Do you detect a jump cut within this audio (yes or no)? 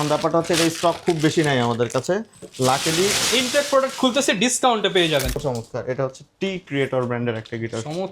yes